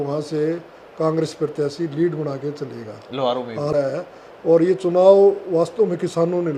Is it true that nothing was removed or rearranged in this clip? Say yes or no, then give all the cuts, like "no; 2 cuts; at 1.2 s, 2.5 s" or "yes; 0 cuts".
no; 1 cut; at 3.7 s